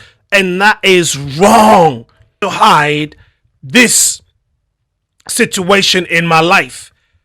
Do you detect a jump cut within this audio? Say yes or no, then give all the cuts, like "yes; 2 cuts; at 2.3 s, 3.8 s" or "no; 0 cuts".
yes; 1 cut; at 2.4 s